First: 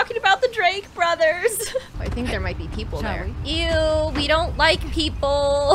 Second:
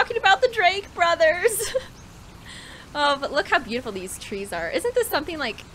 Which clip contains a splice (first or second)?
first